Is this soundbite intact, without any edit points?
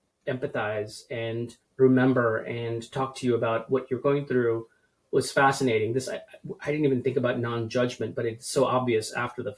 no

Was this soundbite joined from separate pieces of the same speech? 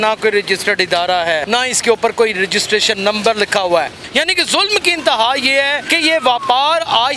yes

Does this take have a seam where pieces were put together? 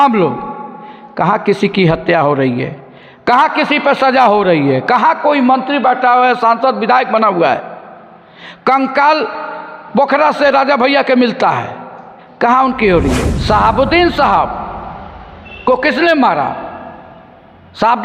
yes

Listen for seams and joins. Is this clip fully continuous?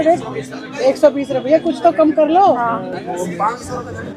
yes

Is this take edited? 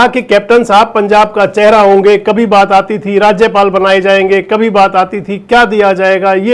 no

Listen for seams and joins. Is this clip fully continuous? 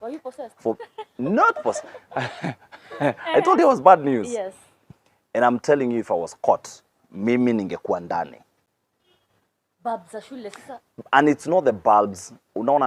yes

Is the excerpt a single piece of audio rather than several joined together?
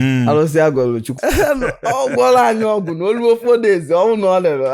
yes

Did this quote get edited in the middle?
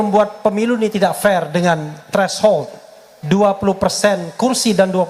no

